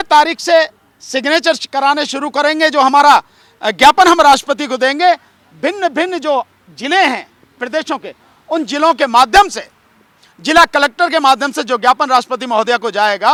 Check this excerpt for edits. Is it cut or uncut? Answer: uncut